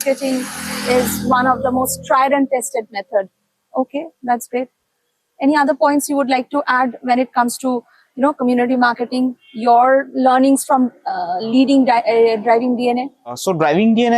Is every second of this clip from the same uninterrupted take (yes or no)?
yes